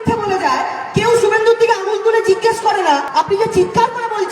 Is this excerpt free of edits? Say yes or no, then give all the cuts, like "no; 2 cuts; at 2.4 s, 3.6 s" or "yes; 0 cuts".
no; 1 cut; at 3.1 s